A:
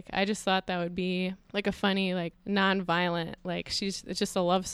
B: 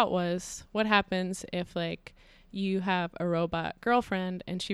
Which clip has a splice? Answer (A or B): A